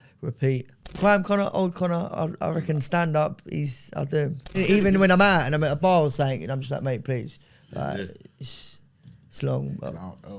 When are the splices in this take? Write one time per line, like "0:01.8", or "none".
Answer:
0:00.9
0:04.6